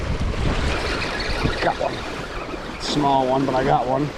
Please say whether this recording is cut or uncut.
uncut